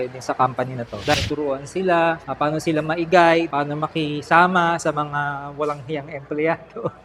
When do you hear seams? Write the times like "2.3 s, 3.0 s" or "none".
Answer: 1.1 s